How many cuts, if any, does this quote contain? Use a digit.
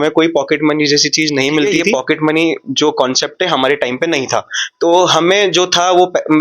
1